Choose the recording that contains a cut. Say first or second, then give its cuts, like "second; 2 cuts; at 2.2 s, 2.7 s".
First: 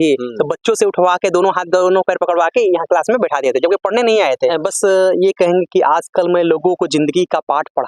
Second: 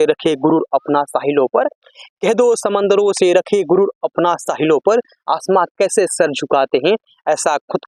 first; 1 cut; at 4.4 s